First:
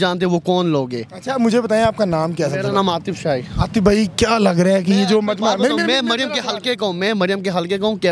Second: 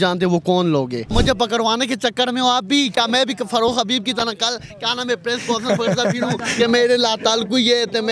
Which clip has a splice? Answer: second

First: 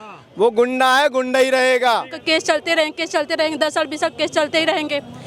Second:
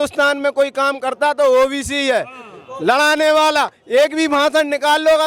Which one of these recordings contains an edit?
first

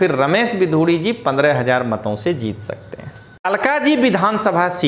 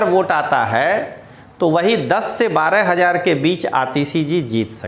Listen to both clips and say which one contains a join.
first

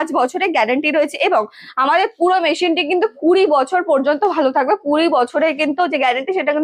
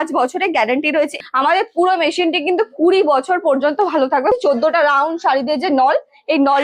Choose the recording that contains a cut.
second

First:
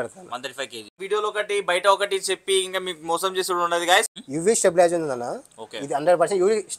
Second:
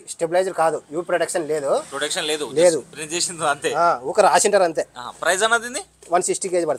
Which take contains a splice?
first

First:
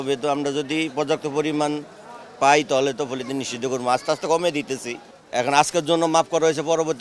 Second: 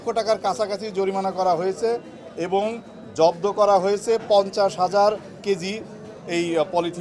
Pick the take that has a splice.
first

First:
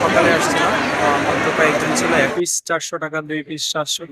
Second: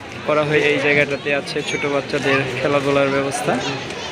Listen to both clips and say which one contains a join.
first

